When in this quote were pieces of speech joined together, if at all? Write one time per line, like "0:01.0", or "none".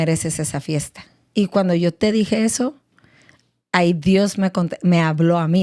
0:01.2

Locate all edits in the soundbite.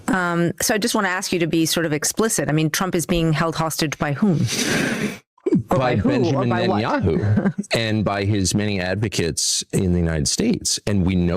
none

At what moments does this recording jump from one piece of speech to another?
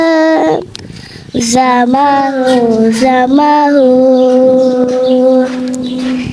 none

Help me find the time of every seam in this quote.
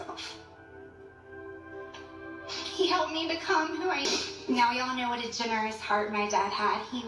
0:04.0

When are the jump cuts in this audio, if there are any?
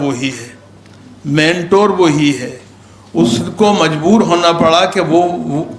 none

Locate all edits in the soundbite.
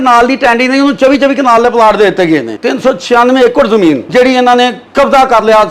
0:02.6
0:04.0

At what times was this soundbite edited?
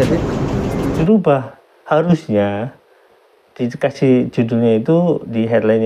0:01.0

